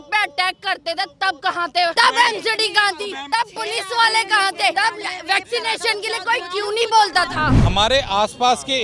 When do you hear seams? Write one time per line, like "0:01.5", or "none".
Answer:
0:01.9
0:03.2
0:04.7
0:07.6